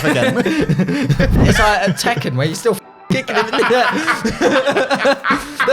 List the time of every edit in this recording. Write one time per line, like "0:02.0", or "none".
0:01.4